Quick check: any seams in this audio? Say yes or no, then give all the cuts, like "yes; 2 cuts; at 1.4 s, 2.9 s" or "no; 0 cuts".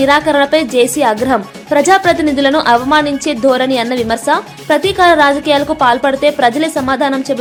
no; 0 cuts